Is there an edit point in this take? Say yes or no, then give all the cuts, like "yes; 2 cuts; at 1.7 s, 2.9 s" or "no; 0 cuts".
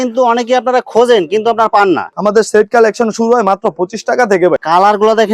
yes; 2 cuts; at 2.1 s, 4.6 s